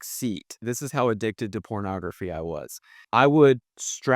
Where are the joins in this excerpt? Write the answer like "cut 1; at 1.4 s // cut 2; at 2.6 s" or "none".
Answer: cut 1; at 3.0 s